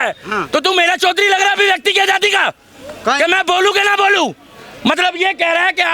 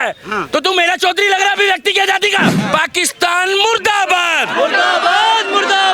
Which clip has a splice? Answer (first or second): second